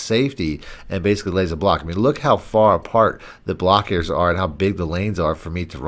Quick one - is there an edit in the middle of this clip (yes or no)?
no